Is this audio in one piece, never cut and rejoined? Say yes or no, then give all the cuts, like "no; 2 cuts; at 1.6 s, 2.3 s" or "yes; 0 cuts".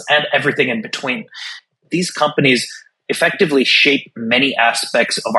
no; 1 cut; at 1.8 s